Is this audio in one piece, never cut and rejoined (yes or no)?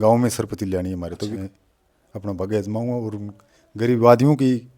no